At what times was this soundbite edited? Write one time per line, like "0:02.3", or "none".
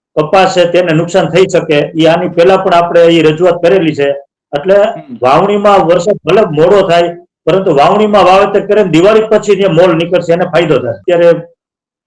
0:10.9

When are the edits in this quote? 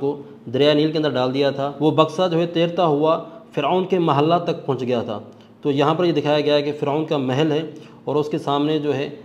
0:01.7

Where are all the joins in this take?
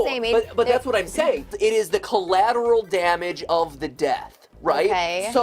0:01.5

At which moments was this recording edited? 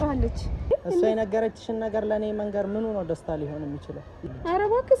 0:00.7
0:04.1

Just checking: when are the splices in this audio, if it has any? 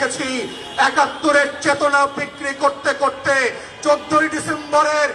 none

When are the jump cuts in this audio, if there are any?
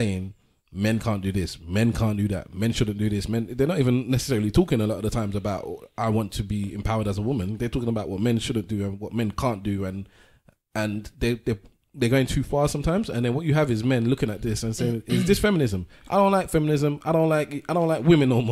none

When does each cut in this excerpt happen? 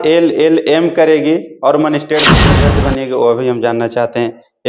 0:02.5

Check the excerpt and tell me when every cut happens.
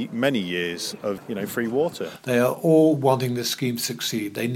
0:01.2
0:02.1

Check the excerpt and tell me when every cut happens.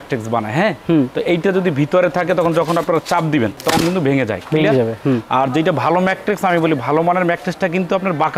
none

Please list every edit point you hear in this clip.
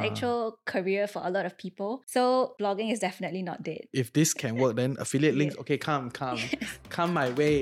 0:03.9

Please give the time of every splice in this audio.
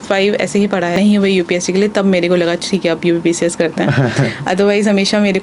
0:01.0

